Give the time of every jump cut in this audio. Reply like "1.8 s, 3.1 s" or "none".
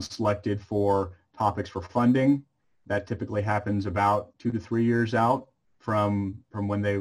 4.3 s